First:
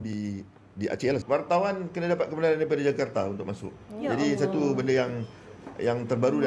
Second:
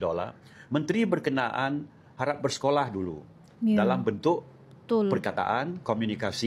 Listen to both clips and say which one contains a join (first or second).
first